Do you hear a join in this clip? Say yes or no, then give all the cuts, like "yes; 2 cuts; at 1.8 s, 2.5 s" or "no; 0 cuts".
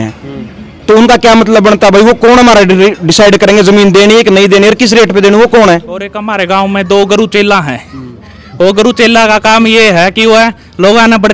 yes; 1 cut; at 6.2 s